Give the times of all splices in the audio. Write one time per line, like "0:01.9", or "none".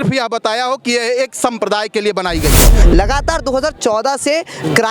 0:02.8